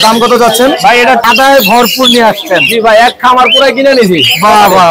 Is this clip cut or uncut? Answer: cut